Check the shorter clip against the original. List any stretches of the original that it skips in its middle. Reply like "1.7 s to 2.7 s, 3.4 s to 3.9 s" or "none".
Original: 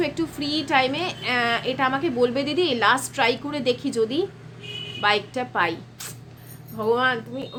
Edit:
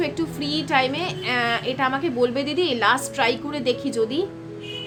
none